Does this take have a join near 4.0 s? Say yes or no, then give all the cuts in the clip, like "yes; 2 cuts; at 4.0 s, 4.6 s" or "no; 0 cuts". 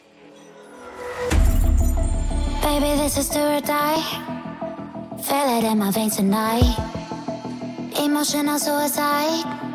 yes; 1 cut; at 4.0 s